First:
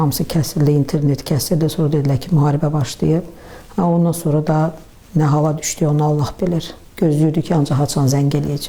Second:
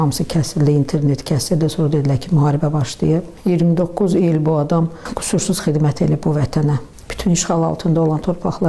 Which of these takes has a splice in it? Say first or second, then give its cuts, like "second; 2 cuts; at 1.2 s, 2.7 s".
second; 3 cuts; at 3.3 s, 5.1 s, 6.9 s